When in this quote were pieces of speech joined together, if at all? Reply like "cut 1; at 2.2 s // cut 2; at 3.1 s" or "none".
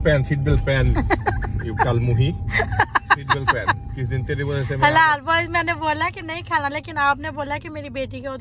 none